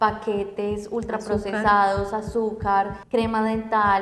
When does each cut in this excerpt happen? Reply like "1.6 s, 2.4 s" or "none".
3.0 s